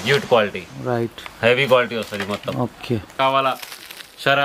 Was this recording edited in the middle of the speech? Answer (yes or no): yes